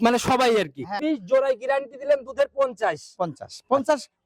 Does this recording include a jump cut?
yes; 1 cut; at 1.0 s

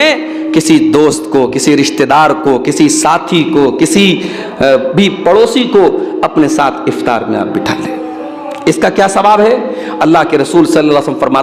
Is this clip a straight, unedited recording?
yes; 0 cuts

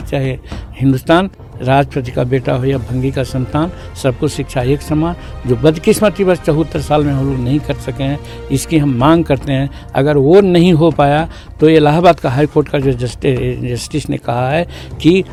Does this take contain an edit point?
no; 0 cuts

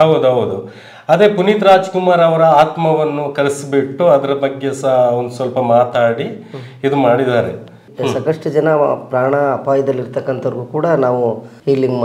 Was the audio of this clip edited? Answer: yes; 1 cut; at 7.9 s

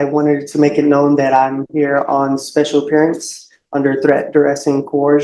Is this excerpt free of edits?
yes; 0 cuts

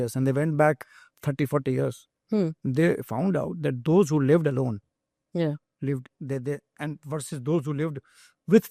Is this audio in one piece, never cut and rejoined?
yes; 0 cuts

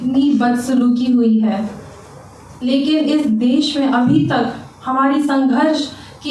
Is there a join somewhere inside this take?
no; 0 cuts

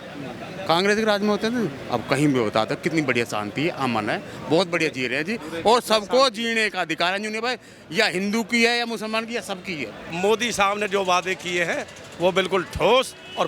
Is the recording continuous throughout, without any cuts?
no; 1 cut; at 10.0 s

